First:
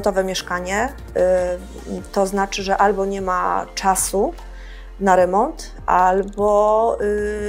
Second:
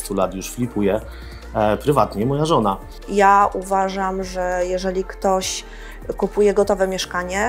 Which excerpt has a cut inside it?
second; 1 cut; at 2.9 s

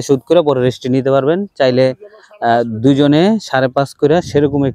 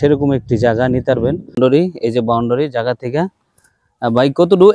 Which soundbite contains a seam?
second; 1 cut; at 1.6 s

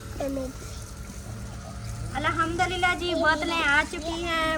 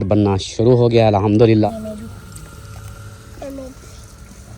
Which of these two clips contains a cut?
second; 1 cut; at 1.7 s

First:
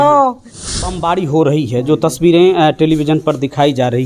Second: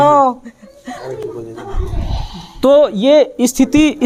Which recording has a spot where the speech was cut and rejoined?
first; 1 cut; at 1.0 s

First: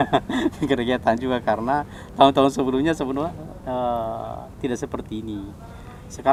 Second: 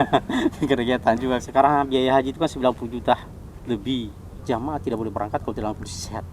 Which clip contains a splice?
second; 2 cuts; at 1.4 s, 4.4 s

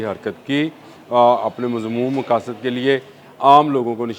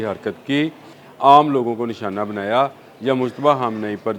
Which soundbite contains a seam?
second; 1 cut; at 0.9 s

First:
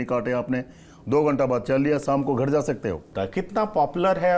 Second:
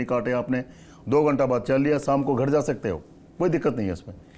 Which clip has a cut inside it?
first; 1 cut; at 3.1 s

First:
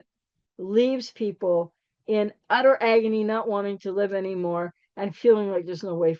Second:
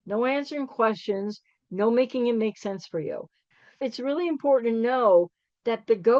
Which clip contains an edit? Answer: second; 1 cut; at 3.4 s

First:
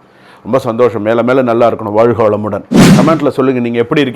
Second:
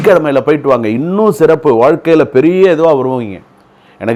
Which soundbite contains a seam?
first; 1 cut; at 2.8 s

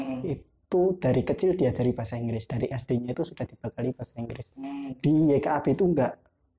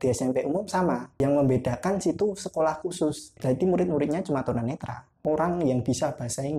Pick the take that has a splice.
second; 3 cuts; at 1.1 s, 3.3 s, 5.2 s

